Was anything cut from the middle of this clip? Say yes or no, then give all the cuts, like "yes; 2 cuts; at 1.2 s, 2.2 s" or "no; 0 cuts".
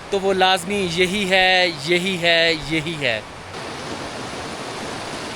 yes; 1 cut; at 3.6 s